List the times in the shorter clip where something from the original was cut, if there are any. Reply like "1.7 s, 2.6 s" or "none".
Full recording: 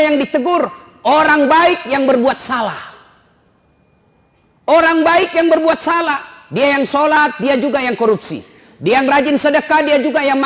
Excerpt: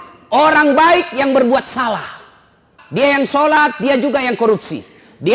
2.7 s